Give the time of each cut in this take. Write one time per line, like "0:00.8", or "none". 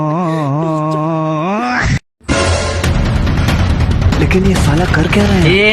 0:02.1